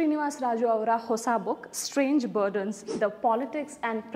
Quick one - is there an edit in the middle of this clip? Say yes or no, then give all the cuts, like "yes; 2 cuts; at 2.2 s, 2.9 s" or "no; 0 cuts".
no; 0 cuts